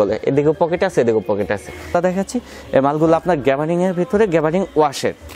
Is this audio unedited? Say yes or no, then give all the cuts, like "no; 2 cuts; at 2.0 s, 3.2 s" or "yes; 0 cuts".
no; 1 cut; at 1.9 s